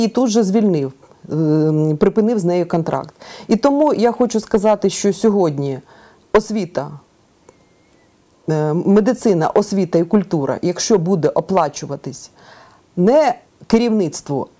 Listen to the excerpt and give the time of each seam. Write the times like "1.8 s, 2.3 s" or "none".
none